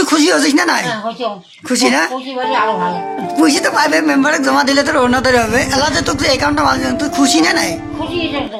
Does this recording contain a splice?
no; 0 cuts

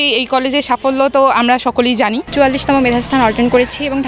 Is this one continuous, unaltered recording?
no; 1 cut; at 2.2 s

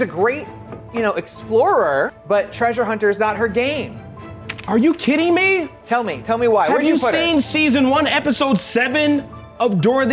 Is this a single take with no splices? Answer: no; 1 cut; at 2.2 s

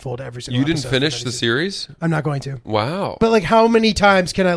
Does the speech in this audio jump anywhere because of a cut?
yes; 1 cut; at 3.2 s

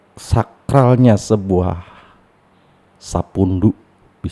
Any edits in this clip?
no; 0 cuts

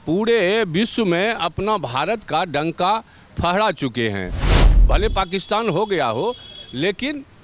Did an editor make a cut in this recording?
yes; 1 cut; at 4.8 s

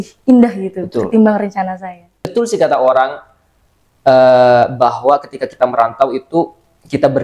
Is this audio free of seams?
no; 1 cut; at 2.3 s

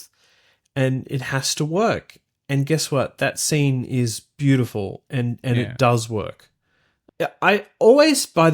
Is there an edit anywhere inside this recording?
yes; 1 cut; at 7.0 s

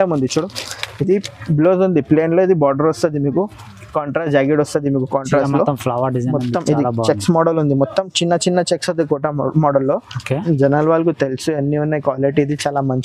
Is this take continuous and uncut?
yes; 0 cuts

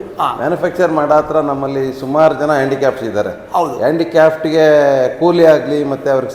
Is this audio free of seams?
yes; 0 cuts

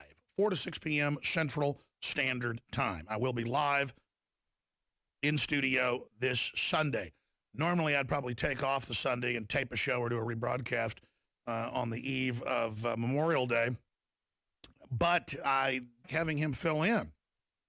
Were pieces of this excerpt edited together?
no; 0 cuts

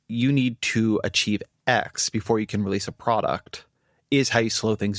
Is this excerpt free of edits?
yes; 0 cuts

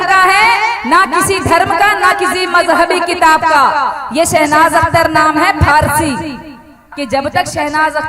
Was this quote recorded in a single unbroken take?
no; 1 cut; at 6.9 s

